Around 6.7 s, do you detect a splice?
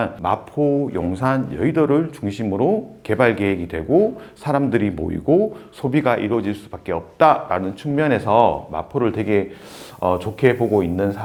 no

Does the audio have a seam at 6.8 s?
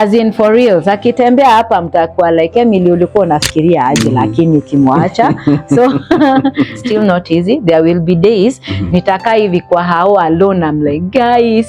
yes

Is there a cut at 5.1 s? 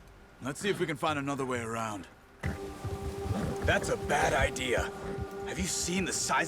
no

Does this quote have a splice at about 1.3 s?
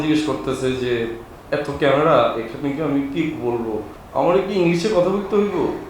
yes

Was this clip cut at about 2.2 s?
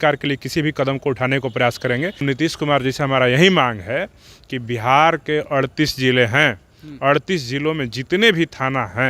yes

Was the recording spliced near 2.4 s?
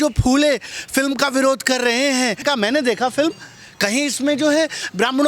yes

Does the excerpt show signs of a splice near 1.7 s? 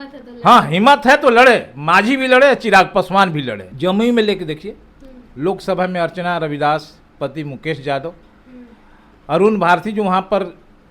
no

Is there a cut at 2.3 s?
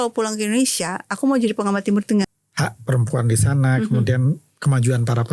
yes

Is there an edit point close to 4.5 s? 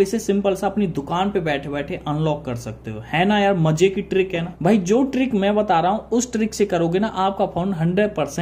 yes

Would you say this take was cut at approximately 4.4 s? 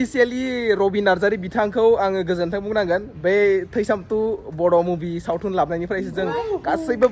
no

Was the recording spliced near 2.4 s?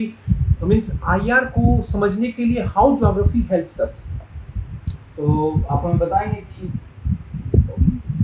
no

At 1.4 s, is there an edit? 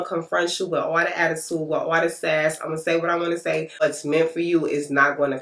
no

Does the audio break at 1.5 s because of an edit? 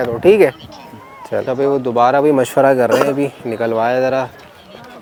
no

